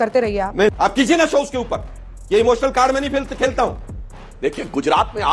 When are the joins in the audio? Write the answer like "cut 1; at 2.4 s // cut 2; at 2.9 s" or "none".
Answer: cut 1; at 0.7 s // cut 2; at 3.9 s